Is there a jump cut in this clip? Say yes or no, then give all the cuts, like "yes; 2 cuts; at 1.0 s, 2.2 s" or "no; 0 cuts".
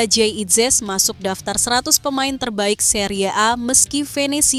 no; 0 cuts